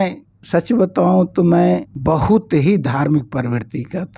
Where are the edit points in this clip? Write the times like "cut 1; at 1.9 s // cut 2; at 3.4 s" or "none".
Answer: cut 1; at 1.9 s